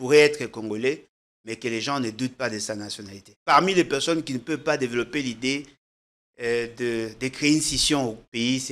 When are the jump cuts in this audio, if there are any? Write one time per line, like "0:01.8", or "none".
0:03.3